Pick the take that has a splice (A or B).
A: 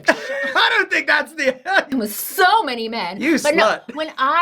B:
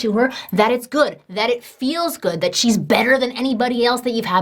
A